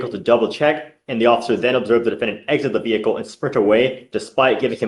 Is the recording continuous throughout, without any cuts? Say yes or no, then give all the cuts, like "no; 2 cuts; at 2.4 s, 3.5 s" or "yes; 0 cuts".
yes; 0 cuts